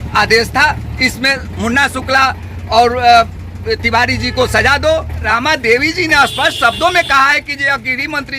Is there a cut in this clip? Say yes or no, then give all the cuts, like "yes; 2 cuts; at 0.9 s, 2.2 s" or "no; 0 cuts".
yes; 1 cut; at 5.2 s